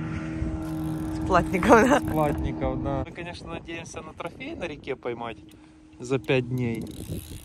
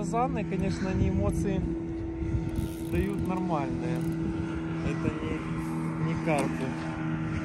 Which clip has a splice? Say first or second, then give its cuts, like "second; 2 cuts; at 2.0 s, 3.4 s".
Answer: first; 1 cut; at 3.1 s